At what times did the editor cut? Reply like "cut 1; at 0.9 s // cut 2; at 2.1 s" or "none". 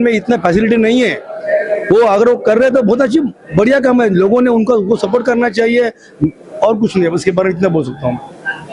none